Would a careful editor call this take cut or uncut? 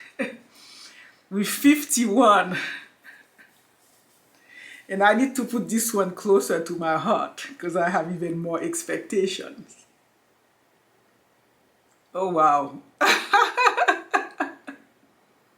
cut